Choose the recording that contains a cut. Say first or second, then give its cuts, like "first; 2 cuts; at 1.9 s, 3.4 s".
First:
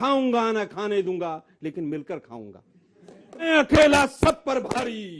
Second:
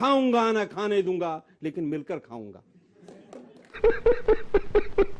first; 1 cut; at 3.5 s